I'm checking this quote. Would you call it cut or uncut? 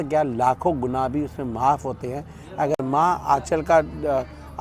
uncut